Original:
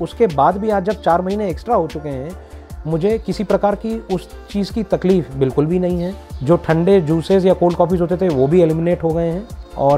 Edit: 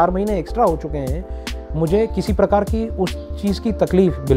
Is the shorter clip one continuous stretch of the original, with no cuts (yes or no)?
yes